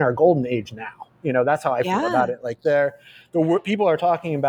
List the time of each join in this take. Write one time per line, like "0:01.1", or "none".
none